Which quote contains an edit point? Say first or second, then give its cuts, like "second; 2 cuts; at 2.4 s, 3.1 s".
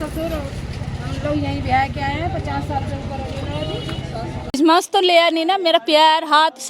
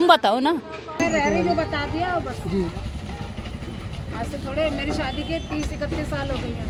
first; 1 cut; at 4.6 s